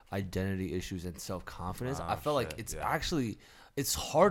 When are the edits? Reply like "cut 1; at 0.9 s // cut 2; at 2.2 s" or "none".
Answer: none